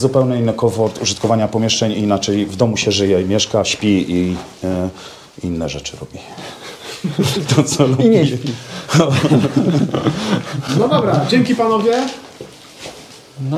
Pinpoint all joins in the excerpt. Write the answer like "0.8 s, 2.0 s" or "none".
none